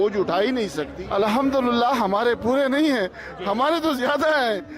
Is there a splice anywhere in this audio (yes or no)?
yes